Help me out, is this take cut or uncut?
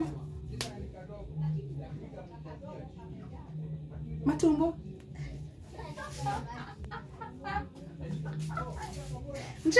uncut